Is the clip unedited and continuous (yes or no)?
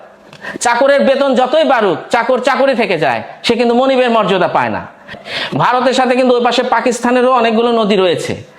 no